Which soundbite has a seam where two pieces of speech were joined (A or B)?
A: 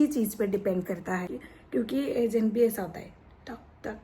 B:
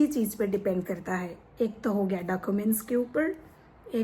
A